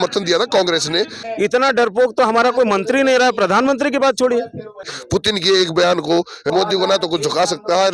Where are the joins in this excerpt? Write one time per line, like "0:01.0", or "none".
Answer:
0:01.2
0:05.0
0:06.5